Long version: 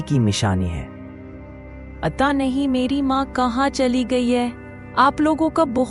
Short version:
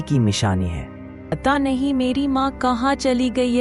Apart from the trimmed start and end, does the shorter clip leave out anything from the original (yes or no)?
yes